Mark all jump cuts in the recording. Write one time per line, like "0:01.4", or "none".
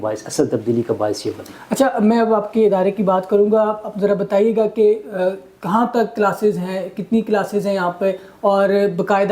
none